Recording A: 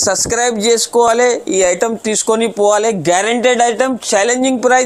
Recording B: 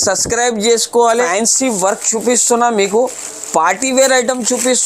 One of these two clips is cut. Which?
B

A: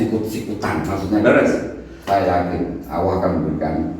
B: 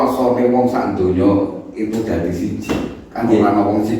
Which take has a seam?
A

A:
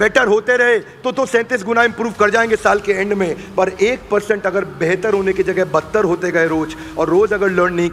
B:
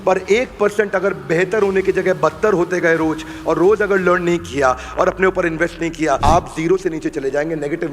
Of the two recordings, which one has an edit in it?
B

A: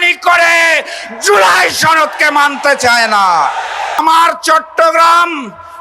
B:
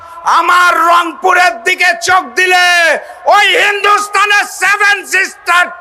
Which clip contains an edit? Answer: A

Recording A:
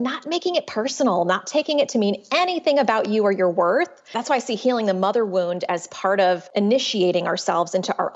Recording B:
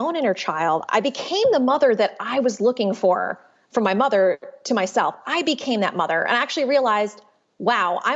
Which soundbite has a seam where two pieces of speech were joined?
A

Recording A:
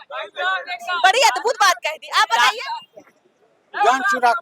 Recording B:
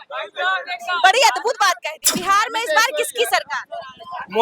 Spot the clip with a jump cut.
B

